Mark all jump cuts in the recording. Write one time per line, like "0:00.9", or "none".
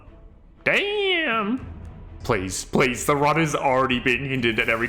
0:02.1